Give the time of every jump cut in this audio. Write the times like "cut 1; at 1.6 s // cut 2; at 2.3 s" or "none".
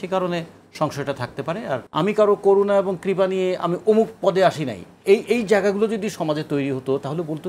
cut 1; at 1.9 s